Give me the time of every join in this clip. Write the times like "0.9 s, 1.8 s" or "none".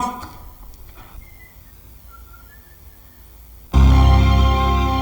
3.7 s